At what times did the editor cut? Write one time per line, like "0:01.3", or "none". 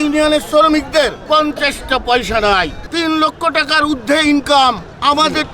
0:02.8